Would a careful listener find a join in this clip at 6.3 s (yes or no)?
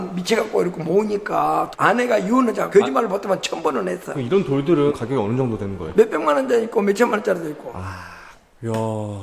no